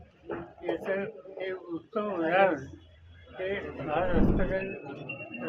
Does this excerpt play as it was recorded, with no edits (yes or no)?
no